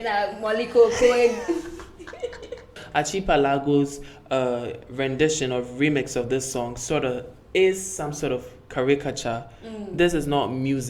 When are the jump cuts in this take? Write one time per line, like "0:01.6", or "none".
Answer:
0:02.8